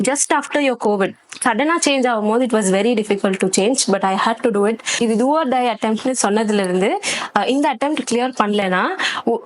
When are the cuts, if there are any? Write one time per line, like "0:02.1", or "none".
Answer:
0:01.3
0:04.9